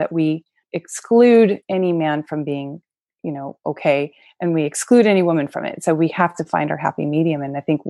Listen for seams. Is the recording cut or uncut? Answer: uncut